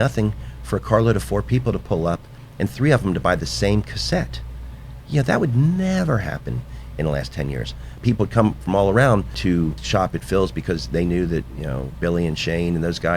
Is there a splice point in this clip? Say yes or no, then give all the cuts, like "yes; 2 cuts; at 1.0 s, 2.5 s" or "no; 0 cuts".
yes; 2 cuts; at 8.0 s, 9.6 s